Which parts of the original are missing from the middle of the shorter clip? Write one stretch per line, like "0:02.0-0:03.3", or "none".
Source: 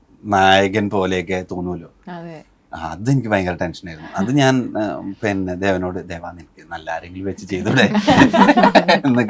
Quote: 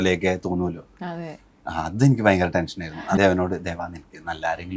0:04.2-0:05.6

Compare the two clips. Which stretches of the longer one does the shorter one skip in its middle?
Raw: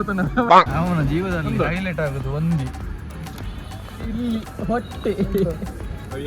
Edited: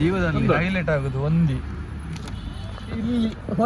none

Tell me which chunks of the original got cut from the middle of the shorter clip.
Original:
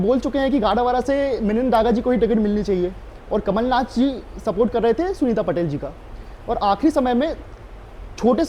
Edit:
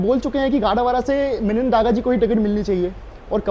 none

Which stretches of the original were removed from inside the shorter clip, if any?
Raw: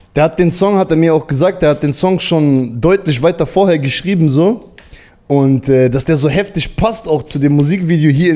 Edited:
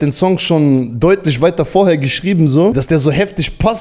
0:04.6-0:06.0

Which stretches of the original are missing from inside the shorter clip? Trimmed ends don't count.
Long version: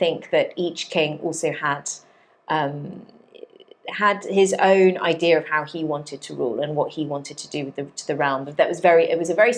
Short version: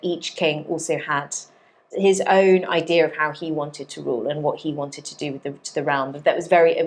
0:02.4-0:04.2

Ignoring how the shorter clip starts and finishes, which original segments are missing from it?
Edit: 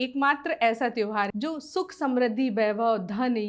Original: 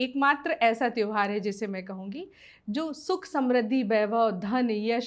0:01.3-0:02.6

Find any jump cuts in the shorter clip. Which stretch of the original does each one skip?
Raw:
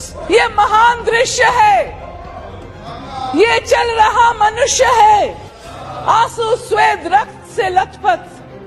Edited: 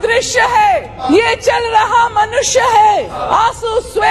0:02.0-0:03.2
0:05.4-0:05.9

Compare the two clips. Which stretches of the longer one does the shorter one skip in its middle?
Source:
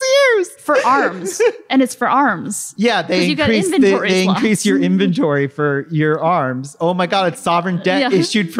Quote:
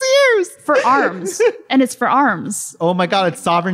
0:02.6-0:06.6

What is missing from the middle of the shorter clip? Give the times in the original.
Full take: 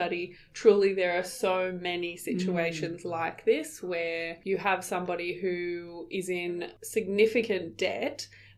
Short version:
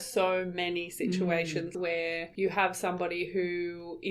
0:03.0-0:03.8

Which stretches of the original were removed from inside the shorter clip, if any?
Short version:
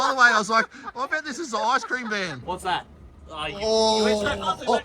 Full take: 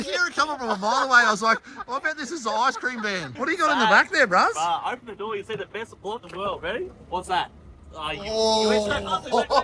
0:03.3-0:07.0

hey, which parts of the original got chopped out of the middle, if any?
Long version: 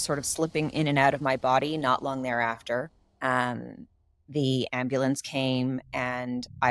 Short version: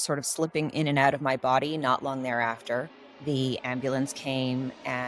0:03.0-0:04.1

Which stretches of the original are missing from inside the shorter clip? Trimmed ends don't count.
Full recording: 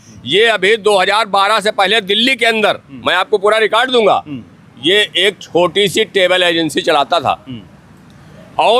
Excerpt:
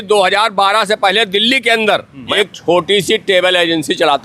0:03.0-0:05.1

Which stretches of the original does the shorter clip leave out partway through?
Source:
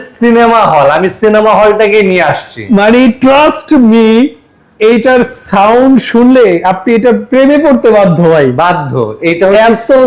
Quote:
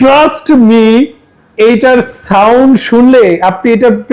none

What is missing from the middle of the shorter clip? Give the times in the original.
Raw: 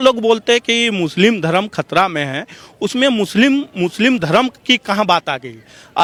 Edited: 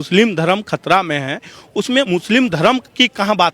0:03.1-0:03.7

